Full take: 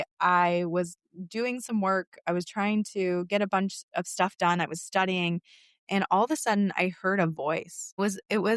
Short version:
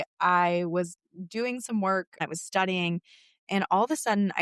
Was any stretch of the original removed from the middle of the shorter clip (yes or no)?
yes